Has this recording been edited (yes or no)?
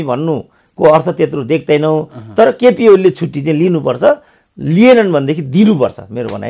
no